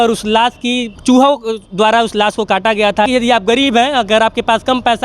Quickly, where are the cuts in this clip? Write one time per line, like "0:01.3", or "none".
0:03.1

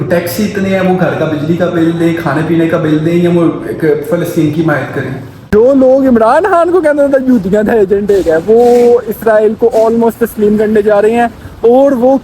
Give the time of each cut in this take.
0:05.5

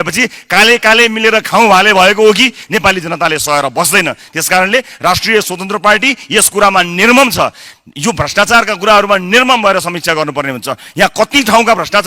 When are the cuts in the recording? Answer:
0:02.6

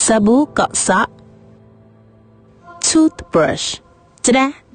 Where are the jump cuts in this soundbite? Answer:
0:01.0

